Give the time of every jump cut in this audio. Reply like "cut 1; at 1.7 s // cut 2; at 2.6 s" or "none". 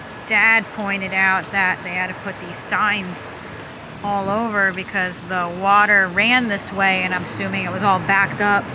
none